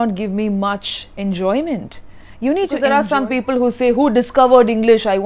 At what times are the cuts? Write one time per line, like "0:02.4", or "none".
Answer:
0:02.8